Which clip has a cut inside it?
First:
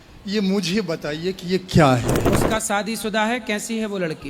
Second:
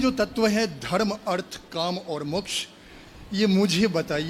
first; 1 cut; at 2.3 s

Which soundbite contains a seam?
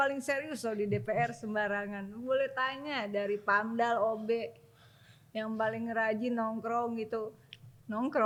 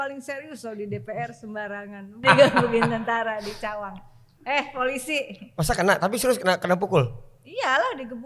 second; 1 cut; at 2.2 s

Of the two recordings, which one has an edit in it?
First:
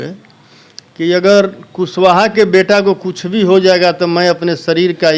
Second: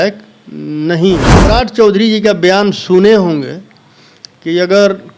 second; 1 cut; at 1.3 s

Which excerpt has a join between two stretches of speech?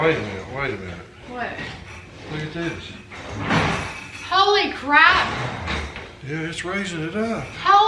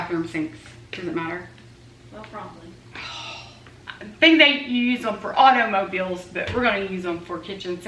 second; 1 cut; at 3.7 s

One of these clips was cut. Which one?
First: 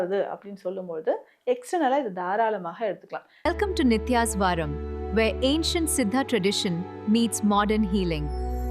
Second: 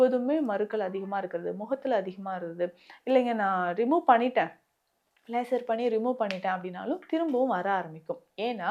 first; 1 cut; at 3.2 s

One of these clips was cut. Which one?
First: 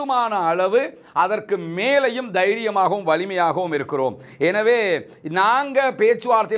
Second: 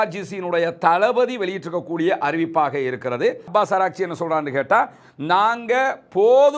second; 1 cut; at 3.5 s

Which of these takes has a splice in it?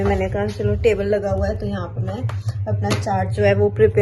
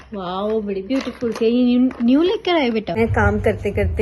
second; 1 cut; at 3.0 s

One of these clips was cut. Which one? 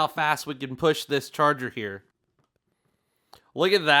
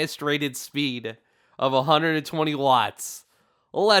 first; 1 cut; at 2.2 s

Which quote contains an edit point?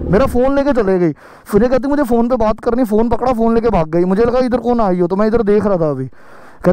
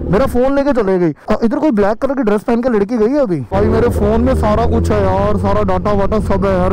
second; 2 cuts; at 1.2 s, 3.5 s

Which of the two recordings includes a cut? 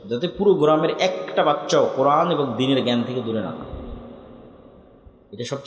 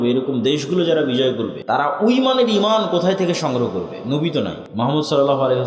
second; 2 cuts; at 1.6 s, 4.6 s

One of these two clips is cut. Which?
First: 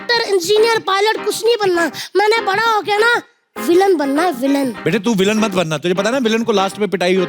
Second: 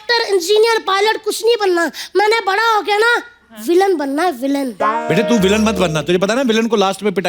first; 1 cut; at 4.8 s

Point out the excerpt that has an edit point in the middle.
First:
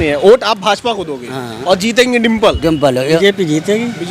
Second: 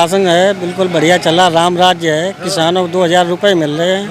first; 1 cut; at 3.2 s

